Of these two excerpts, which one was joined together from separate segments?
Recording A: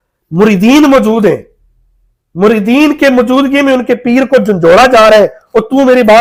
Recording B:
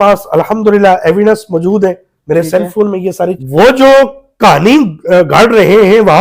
B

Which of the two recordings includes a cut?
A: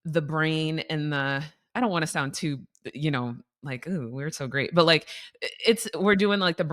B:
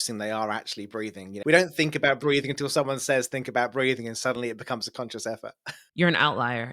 B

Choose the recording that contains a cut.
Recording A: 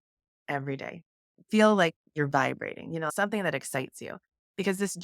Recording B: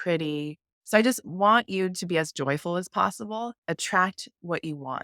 A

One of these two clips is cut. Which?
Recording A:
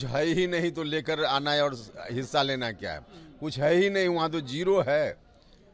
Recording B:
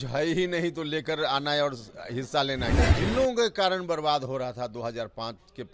B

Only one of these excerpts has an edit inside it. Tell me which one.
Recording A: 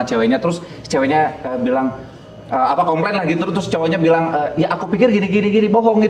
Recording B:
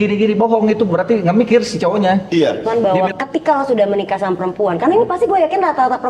B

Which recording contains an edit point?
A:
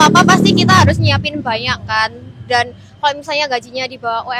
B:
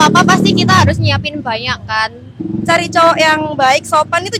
B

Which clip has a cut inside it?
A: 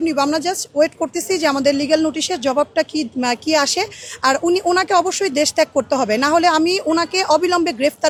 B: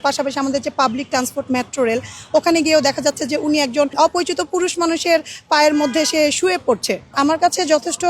B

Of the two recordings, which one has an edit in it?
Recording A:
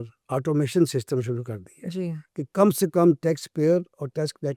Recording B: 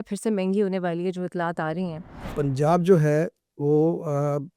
B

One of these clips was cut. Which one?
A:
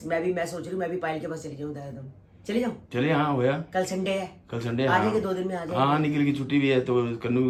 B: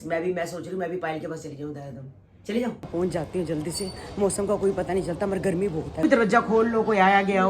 B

